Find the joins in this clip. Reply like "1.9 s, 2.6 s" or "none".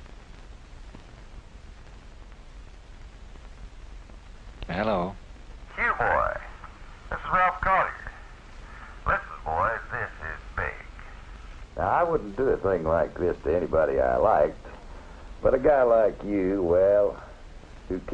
4.6 s